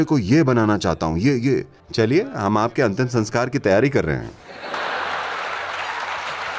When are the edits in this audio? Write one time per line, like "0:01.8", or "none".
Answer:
0:04.7

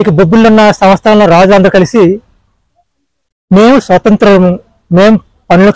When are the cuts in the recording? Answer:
none

